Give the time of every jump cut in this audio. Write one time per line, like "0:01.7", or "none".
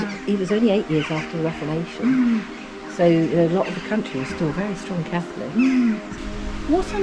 0:06.1